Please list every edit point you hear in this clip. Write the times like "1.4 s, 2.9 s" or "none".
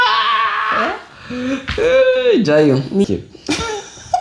3.0 s